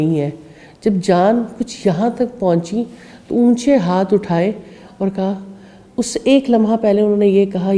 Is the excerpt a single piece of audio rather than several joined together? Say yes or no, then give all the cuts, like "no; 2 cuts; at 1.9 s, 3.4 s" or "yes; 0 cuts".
yes; 0 cuts